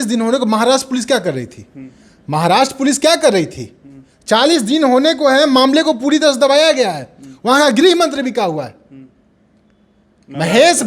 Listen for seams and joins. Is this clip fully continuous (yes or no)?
yes